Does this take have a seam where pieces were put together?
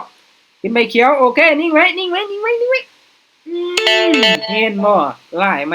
no; 0 cuts

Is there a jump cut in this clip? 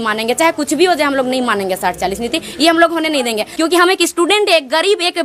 yes; 1 cut; at 3.5 s

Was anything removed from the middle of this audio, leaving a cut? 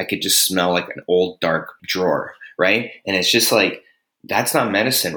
yes; 1 cut; at 1.8 s

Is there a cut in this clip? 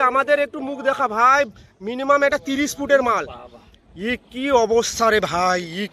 no; 0 cuts

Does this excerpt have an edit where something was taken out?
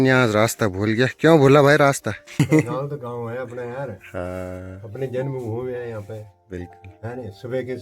yes; 1 cut; at 2.2 s

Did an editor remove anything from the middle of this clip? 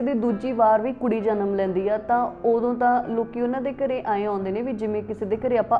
no; 0 cuts

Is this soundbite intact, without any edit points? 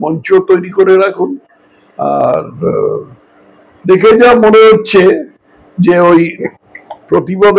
yes; 0 cuts

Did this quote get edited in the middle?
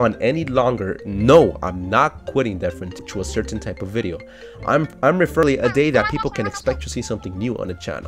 yes; 2 cuts; at 3.0 s, 5.4 s

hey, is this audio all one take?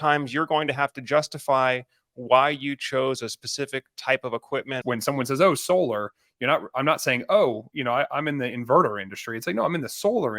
no; 1 cut; at 4.8 s

